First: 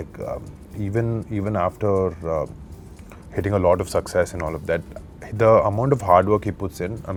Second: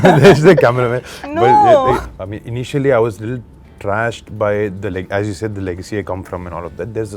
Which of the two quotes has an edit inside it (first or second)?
second